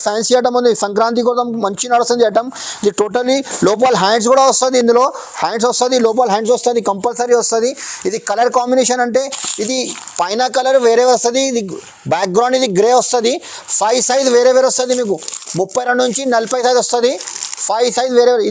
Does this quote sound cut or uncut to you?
uncut